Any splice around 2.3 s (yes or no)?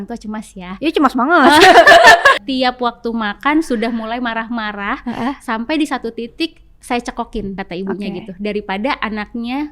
yes